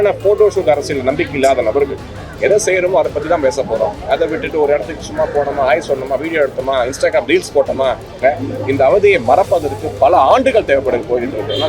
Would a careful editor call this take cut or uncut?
cut